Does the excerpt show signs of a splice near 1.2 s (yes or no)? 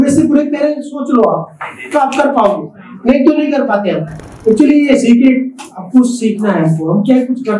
no